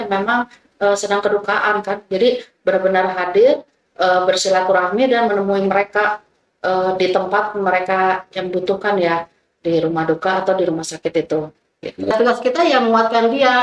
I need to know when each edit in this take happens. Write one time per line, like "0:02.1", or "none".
0:12.1

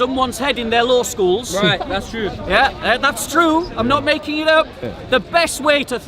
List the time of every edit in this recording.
0:04.9

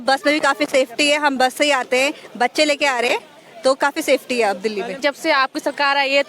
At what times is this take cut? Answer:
0:05.0

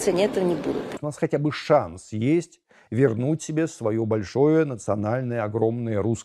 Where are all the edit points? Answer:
0:01.0

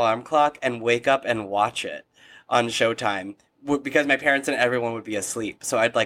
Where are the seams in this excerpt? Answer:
none

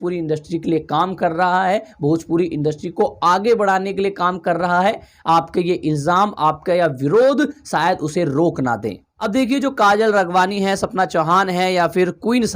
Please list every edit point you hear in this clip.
0:09.1

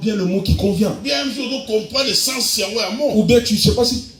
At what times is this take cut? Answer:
none

